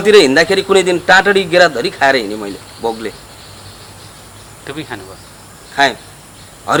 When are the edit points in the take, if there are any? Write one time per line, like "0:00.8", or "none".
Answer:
none